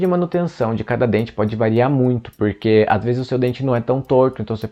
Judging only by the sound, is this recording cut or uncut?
uncut